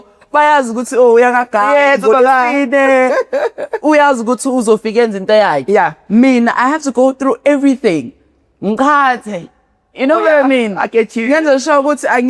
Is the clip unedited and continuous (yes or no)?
yes